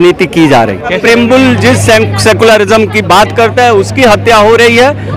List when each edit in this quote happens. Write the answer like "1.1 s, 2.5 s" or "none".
1.0 s